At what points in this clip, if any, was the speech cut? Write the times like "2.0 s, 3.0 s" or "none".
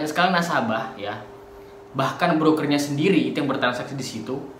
none